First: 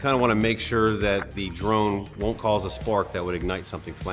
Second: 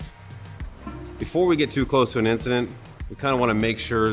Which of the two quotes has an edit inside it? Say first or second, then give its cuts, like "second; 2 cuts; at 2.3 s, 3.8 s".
second; 1 cut; at 1.2 s